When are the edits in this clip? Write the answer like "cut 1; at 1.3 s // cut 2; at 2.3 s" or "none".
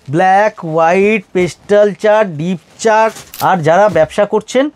cut 1; at 3.3 s